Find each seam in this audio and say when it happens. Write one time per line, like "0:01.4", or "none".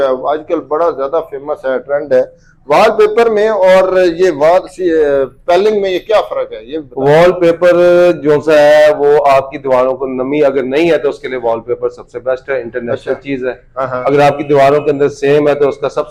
none